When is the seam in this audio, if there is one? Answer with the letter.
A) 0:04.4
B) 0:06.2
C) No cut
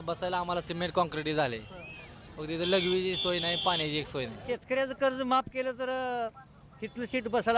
A